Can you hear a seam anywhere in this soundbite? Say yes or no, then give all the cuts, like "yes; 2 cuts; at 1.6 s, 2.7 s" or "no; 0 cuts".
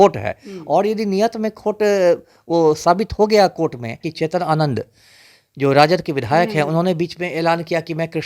yes; 1 cut; at 4.1 s